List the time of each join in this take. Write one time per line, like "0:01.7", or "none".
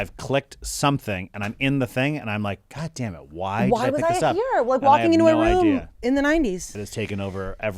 0:06.8